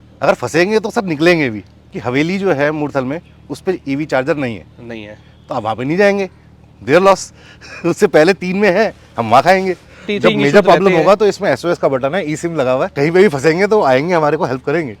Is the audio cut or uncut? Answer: cut